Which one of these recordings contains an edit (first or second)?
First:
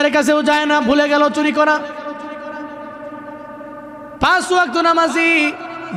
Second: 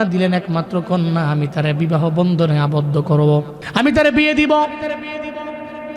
second